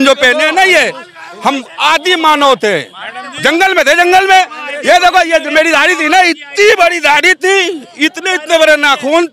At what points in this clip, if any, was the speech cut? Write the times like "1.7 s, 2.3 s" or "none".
none